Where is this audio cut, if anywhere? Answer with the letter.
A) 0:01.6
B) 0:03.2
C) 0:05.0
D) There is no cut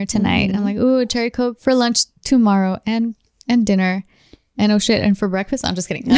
A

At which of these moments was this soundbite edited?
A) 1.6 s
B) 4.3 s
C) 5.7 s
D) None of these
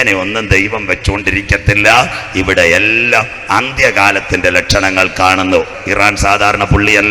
C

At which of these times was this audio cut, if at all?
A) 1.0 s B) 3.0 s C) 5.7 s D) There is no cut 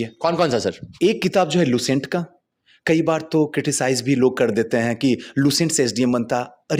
D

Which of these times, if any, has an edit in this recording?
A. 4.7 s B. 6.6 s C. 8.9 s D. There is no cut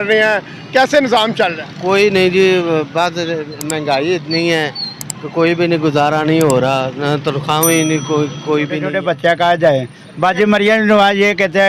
C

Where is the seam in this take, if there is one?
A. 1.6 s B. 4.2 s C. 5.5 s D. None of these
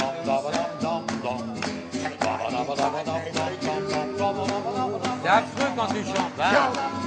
D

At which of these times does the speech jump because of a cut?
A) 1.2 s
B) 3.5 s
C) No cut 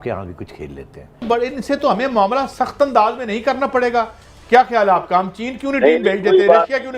A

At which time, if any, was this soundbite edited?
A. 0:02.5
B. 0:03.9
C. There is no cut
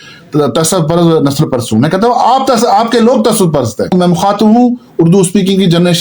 B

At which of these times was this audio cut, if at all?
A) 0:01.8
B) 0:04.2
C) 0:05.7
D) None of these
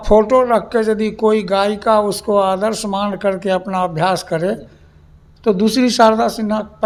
D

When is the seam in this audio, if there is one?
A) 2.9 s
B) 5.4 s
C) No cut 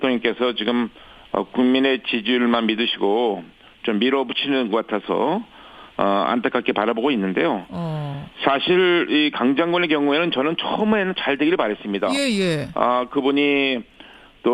C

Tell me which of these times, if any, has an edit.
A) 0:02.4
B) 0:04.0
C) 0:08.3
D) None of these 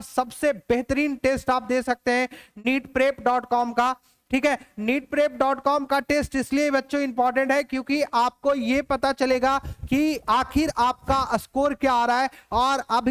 D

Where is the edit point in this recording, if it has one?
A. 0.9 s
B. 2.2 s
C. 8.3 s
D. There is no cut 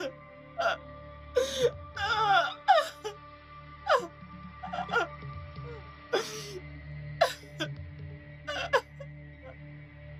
D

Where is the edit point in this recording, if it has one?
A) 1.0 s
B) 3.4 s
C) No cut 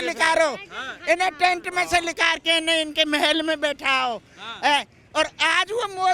C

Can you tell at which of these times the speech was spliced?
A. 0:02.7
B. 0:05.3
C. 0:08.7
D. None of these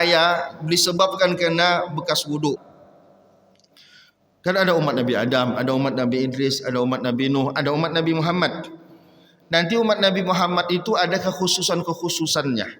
A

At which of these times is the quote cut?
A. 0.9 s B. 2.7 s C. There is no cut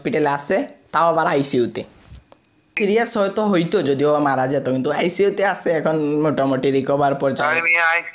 B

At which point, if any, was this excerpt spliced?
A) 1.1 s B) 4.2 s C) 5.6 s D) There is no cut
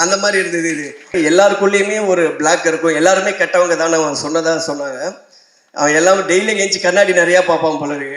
A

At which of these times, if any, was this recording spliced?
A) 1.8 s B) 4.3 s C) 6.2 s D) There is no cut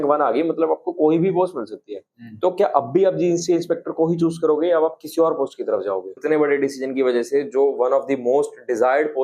C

